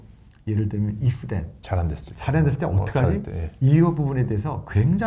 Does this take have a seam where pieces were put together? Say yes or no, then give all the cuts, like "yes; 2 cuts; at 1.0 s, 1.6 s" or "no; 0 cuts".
yes; 1 cut; at 1.5 s